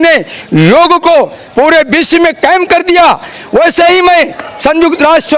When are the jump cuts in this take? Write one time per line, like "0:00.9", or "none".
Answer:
none